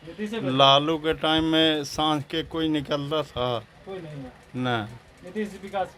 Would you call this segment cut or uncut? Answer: uncut